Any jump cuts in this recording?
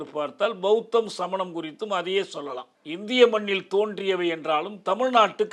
yes; 1 cut; at 2.7 s

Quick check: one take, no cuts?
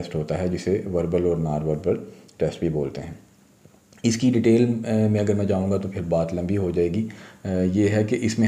yes; 0 cuts

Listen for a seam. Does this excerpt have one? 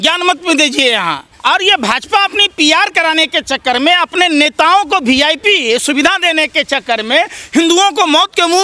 yes; 1 cut; at 1.3 s

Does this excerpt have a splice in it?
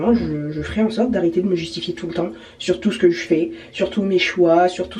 no; 0 cuts

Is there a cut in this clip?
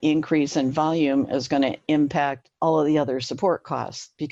no; 0 cuts

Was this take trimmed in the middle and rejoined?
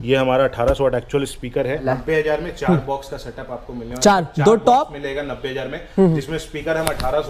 yes; 1 cut; at 1.8 s

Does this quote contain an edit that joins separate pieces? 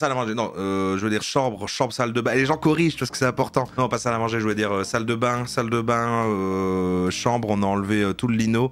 yes; 1 cut; at 1.3 s

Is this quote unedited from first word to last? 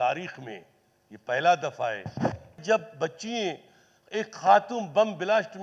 no; 1 cut; at 2.6 s

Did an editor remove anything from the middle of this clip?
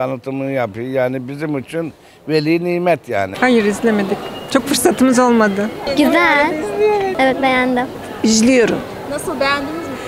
yes; 3 cuts; at 3.3 s, 5.8 s, 8.0 s

